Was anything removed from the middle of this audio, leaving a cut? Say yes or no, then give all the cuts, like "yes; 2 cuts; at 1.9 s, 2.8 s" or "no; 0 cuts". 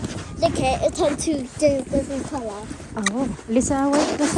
no; 0 cuts